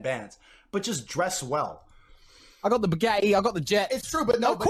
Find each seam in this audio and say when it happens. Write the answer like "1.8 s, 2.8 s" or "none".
none